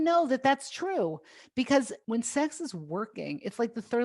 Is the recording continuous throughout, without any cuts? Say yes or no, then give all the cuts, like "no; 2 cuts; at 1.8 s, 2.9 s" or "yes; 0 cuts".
no; 1 cut; at 2.0 s